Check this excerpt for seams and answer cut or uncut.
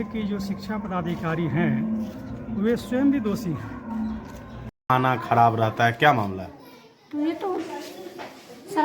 cut